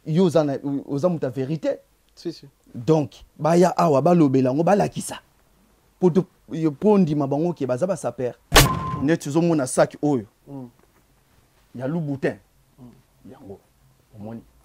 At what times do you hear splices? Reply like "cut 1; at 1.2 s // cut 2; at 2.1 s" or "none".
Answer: cut 1; at 8.8 s